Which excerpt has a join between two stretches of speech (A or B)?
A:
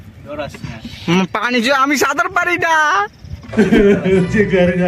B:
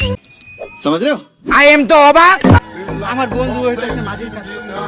B